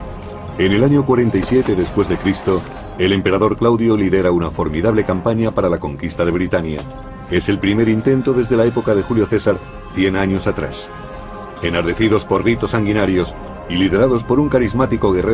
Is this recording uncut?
yes; 0 cuts

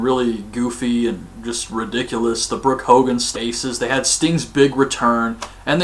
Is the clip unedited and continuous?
yes; 0 cuts

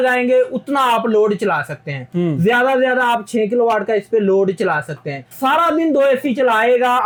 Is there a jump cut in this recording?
no; 0 cuts

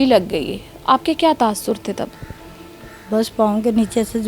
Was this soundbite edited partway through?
no; 0 cuts

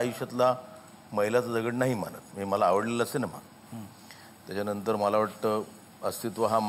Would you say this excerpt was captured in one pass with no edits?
yes; 0 cuts

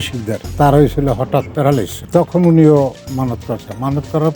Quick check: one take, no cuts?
no; 1 cut; at 2.0 s

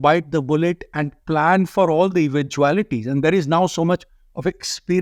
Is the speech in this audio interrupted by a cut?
no; 0 cuts

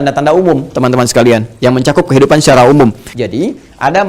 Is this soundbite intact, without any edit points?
no; 1 cut; at 3.1 s

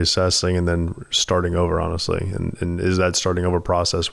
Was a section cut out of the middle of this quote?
no; 0 cuts

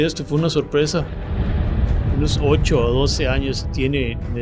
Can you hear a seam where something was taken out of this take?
yes; 1 cut; at 0.9 s

